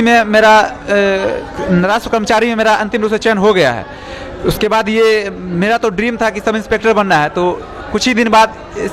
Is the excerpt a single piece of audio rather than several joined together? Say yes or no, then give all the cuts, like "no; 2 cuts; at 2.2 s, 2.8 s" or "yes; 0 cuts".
yes; 0 cuts